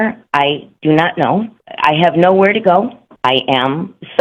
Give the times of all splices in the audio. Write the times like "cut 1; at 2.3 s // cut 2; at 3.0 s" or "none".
cut 1; at 1.6 s // cut 2; at 3.0 s